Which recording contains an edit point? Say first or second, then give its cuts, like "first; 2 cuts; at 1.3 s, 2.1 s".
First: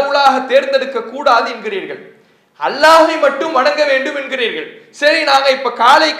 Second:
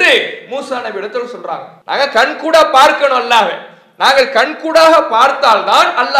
second; 1 cut; at 1.7 s